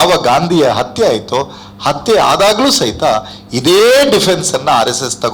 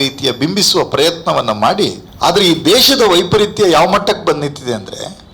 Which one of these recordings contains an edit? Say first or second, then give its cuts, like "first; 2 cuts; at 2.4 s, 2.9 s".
second; 1 cut; at 2.0 s